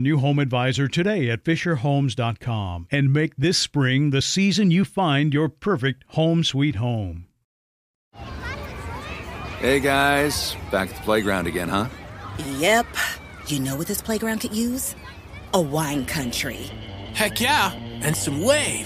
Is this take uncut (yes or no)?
no